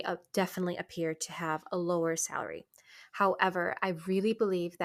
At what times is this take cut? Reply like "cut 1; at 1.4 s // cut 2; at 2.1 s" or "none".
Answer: none